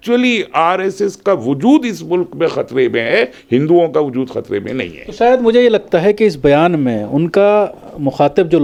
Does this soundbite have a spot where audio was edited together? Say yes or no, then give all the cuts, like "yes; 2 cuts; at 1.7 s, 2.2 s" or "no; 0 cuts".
no; 0 cuts